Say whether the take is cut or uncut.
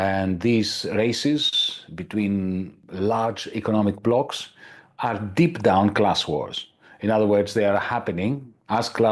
cut